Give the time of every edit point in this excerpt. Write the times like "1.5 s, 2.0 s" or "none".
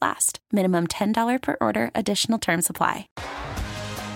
3.1 s